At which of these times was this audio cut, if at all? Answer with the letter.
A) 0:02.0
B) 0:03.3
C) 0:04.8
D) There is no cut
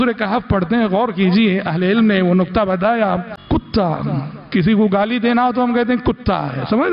B